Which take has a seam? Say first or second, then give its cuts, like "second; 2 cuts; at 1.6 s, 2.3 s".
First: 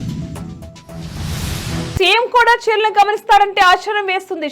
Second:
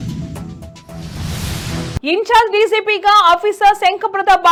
first; 1 cut; at 2.0 s